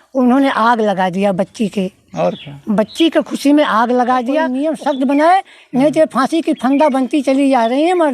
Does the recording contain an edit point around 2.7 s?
no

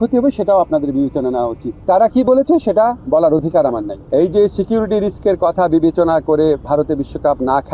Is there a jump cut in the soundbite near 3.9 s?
yes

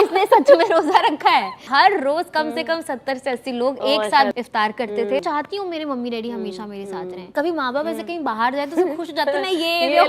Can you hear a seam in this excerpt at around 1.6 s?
yes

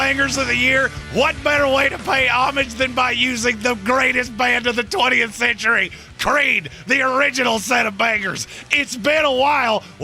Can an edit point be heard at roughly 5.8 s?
yes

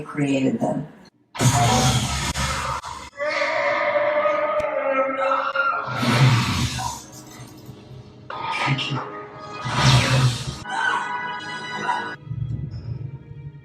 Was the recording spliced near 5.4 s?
no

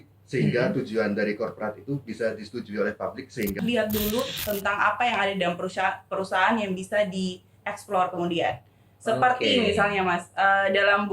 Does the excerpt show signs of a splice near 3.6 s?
yes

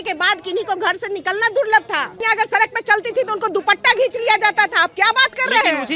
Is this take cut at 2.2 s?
yes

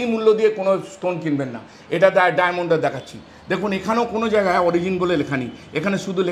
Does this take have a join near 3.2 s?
no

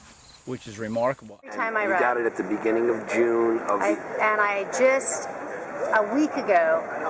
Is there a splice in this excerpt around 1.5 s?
yes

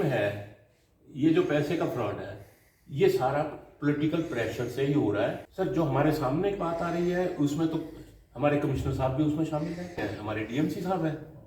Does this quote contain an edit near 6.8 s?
no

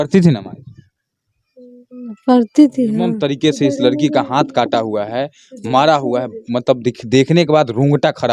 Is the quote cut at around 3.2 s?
yes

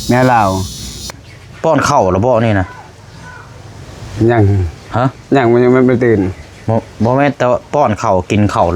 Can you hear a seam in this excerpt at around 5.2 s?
no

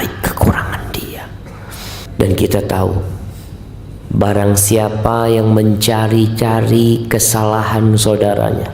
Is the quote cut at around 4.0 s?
no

